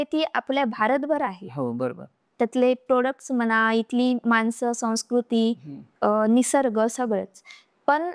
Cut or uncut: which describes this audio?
uncut